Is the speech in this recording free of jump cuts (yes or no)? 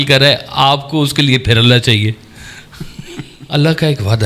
no